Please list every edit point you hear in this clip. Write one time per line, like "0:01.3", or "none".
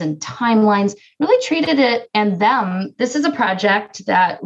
0:02.8